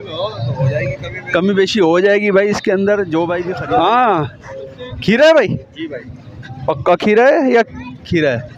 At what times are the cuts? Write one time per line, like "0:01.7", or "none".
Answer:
0:03.5